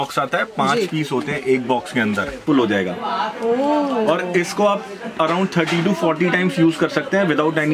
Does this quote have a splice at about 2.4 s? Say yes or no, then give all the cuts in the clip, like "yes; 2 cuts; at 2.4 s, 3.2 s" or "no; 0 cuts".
yes; 1 cut; at 2.4 s